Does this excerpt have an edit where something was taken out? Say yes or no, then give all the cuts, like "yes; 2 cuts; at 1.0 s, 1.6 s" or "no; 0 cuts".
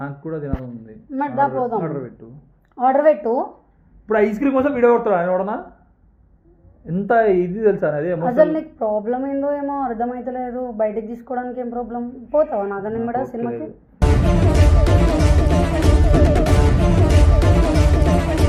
no; 0 cuts